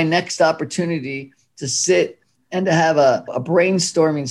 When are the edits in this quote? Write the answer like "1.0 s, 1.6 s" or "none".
none